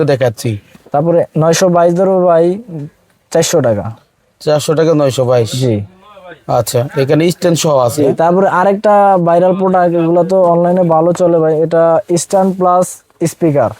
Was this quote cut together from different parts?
no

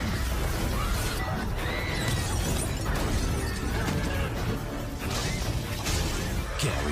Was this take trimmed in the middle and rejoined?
no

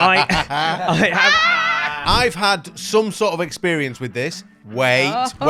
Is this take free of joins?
no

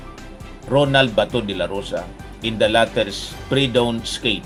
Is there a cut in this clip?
no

